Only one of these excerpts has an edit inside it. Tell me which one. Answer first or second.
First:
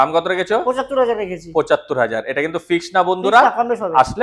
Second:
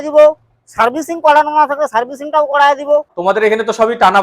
second